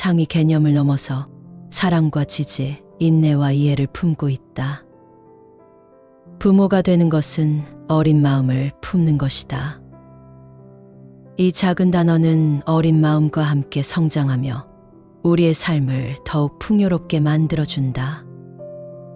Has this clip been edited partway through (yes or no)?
no